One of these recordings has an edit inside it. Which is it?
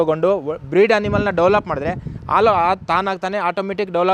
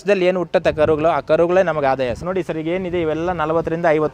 second; 1 cut; at 2.2 s

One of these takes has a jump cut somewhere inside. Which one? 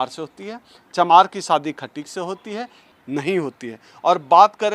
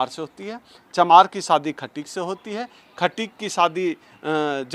first; 1 cut; at 2.8 s

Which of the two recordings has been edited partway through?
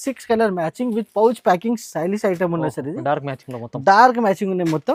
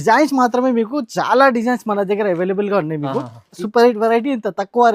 second; 1 cut; at 3.6 s

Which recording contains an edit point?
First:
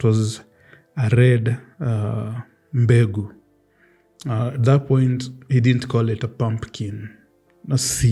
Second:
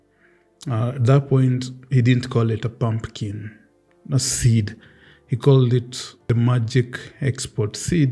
second; 1 cut; at 6.2 s

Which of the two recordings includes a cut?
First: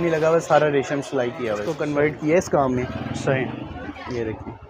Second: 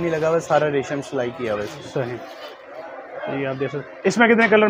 first; 1 cut; at 1.7 s

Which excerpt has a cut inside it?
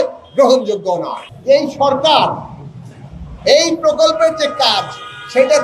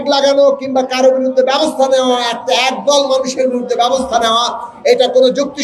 first; 1 cut; at 1.3 s

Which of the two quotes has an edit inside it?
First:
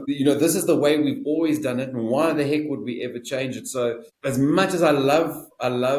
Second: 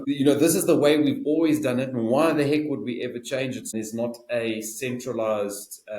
second; 1 cut; at 3.7 s

